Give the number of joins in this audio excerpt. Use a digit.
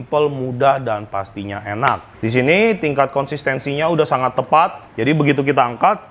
1